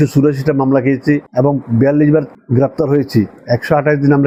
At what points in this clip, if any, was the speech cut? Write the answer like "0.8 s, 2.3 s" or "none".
none